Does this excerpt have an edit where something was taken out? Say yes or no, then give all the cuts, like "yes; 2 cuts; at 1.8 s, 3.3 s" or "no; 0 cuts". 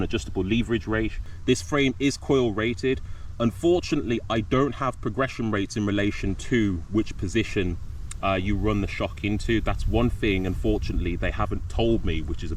no; 0 cuts